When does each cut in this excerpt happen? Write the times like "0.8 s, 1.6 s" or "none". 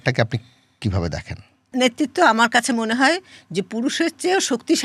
1.7 s